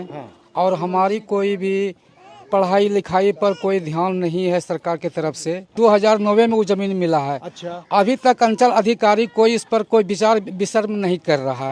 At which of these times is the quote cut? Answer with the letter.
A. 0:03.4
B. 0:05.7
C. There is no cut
B